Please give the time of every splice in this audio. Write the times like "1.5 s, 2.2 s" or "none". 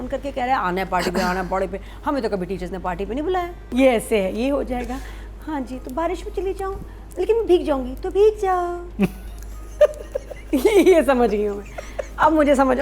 3.6 s